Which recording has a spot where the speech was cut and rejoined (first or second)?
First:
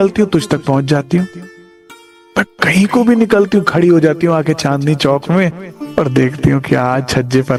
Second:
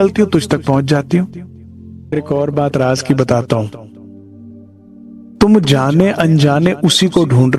second